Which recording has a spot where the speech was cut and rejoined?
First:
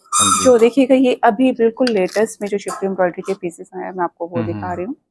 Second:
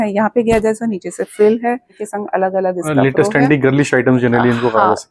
second; 1 cut; at 2.0 s

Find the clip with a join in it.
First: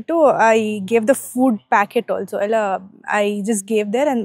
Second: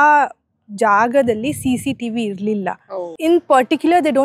second; 1 cut; at 3.0 s

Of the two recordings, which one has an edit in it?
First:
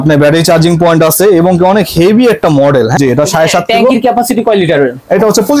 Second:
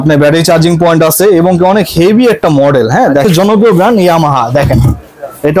second; 1 cut; at 3.2 s

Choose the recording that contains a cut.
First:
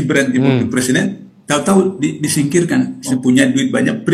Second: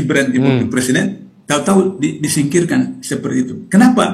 first; 1 cut; at 3.0 s

